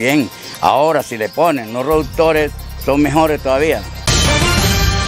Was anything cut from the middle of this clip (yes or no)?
yes